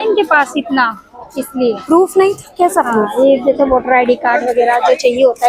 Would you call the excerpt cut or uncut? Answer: uncut